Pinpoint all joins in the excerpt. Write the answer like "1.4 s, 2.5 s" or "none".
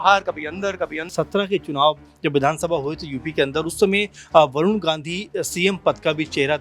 1.1 s